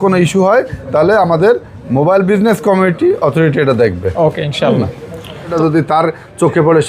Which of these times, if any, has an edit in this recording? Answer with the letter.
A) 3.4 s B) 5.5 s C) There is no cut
B